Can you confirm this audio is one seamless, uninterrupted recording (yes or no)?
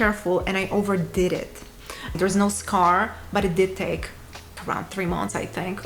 no